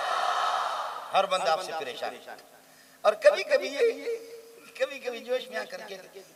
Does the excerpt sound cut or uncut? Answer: uncut